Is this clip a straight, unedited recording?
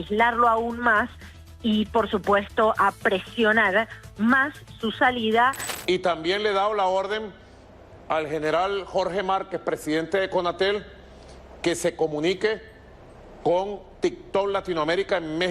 no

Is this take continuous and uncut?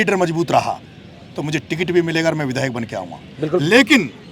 yes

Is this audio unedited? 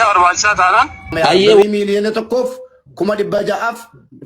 no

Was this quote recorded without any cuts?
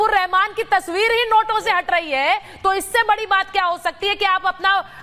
yes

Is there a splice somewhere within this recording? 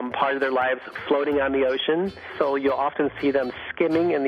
yes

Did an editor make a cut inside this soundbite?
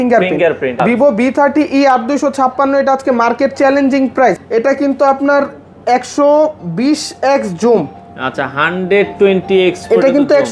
yes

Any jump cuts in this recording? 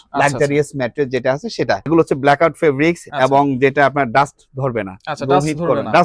yes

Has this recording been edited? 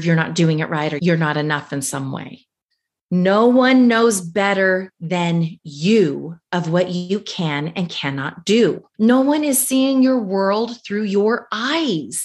yes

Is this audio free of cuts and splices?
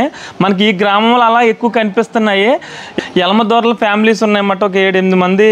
no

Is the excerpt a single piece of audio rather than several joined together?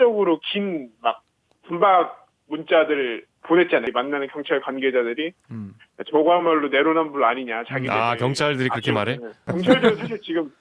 no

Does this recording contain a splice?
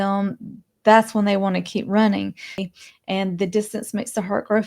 yes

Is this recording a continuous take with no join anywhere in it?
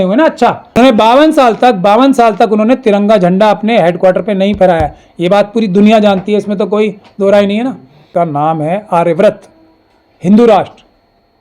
no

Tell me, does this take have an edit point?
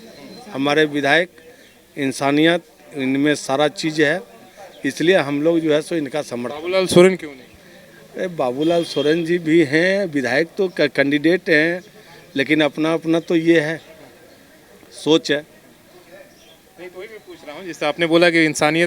no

